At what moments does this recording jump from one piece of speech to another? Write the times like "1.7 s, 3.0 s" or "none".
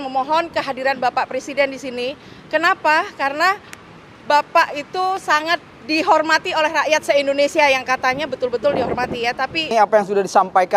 9.7 s